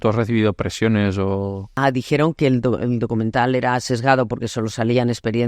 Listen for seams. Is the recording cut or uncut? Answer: cut